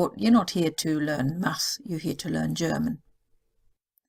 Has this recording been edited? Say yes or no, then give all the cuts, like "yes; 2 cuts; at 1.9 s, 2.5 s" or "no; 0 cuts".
no; 0 cuts